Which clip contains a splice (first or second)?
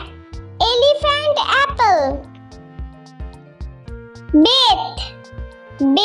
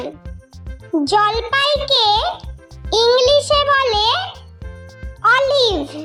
first